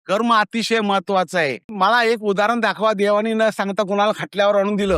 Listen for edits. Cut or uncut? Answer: cut